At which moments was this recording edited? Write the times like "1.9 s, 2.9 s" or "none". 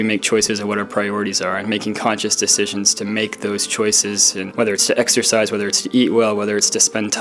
4.4 s

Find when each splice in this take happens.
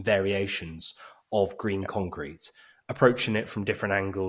none

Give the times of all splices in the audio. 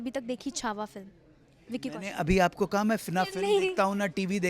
none

